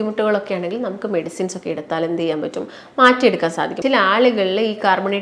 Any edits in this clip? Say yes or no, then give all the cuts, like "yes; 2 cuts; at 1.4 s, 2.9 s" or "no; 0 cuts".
yes; 1 cut; at 3.7 s